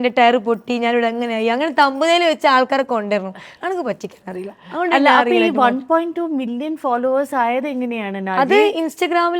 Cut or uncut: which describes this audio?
uncut